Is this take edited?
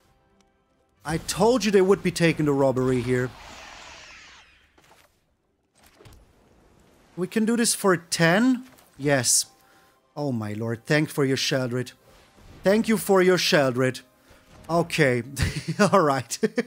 no; 0 cuts

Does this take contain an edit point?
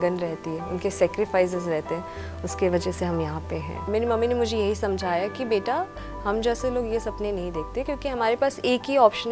yes; 1 cut; at 3.9 s

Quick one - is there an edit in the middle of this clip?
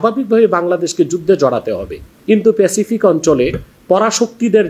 yes; 1 cut; at 2.1 s

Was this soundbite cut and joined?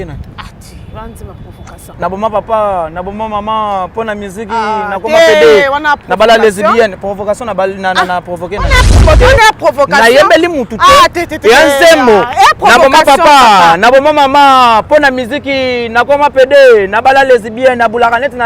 yes; 1 cut; at 9.0 s

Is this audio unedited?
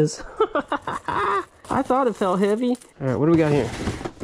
no; 2 cuts; at 1.6 s, 2.9 s

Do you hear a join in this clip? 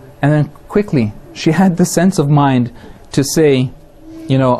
yes; 1 cut; at 1.7 s

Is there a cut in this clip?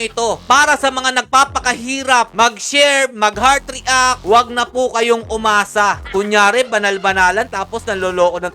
yes; 2 cuts; at 4.2 s, 6.0 s

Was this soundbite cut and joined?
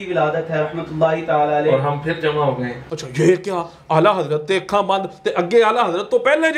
yes; 1 cut; at 2.8 s

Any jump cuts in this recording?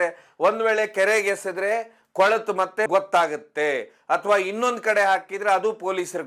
no; 0 cuts

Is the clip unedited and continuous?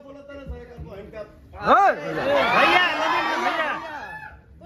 yes; 0 cuts

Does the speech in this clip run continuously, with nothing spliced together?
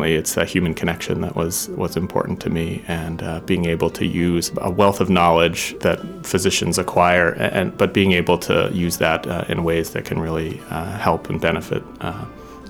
no; 2 cuts; at 4.5 s, 5.7 s

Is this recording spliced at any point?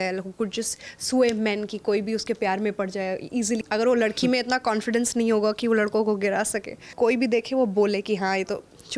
yes; 2 cuts; at 3.6 s, 6.8 s

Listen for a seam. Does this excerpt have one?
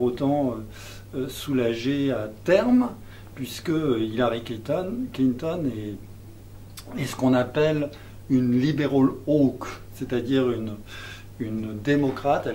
no; 0 cuts

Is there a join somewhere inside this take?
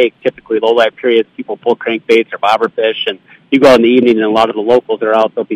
no; 0 cuts

